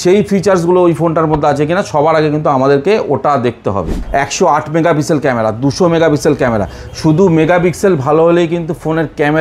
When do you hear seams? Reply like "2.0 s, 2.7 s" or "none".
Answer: 4.0 s